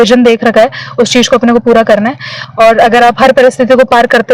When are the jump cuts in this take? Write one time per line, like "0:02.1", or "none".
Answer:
none